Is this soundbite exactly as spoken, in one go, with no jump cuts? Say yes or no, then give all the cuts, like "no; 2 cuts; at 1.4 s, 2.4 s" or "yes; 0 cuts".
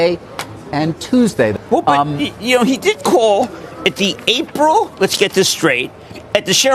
no; 1 cut; at 1.6 s